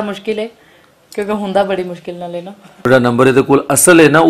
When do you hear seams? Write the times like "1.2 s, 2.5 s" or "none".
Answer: 2.7 s